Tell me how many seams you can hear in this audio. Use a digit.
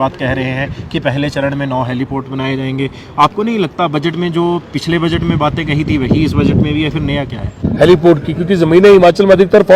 1